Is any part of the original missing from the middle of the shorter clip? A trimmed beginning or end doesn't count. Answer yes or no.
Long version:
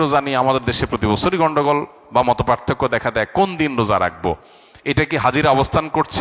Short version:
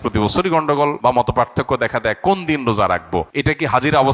yes